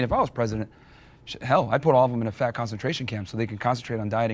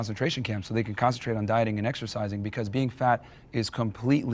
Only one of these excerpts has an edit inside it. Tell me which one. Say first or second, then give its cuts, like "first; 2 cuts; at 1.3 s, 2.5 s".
second; 1 cut; at 2.9 s